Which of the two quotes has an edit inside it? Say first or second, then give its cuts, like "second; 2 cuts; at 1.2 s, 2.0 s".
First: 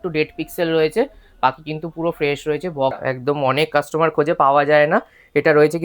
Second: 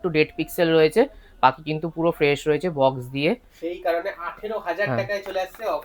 first; 1 cut; at 3.0 s